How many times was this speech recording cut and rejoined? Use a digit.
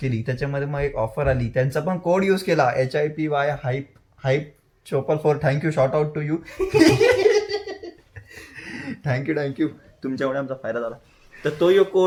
0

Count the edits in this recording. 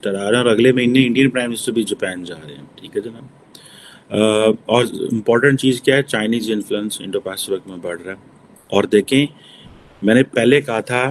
0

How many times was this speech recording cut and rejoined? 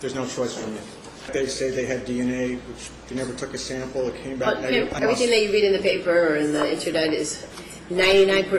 2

